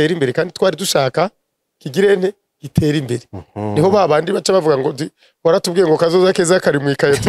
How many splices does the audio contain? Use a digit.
0